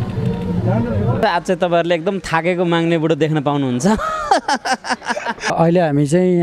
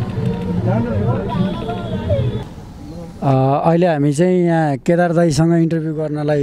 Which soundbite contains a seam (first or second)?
first